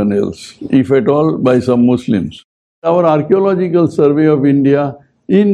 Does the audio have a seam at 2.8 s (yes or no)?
yes